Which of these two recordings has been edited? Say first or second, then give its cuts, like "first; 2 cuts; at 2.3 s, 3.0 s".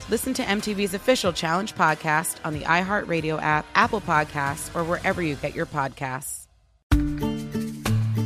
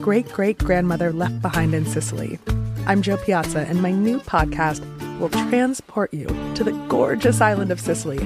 first; 1 cut; at 6.8 s